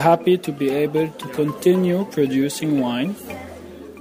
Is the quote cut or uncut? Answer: uncut